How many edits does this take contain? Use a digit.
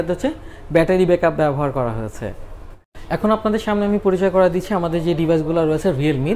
1